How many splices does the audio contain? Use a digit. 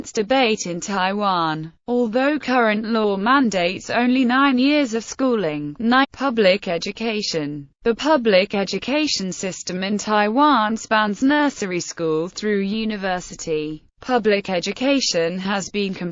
0